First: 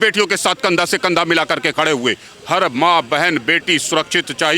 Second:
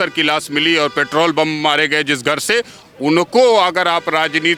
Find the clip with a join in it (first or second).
first